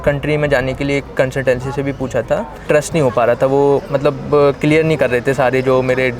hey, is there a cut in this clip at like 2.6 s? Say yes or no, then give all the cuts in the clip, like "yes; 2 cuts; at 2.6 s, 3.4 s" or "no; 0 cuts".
yes; 1 cut; at 2.6 s